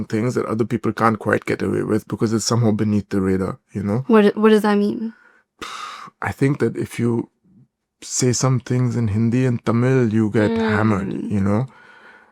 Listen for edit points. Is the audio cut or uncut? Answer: uncut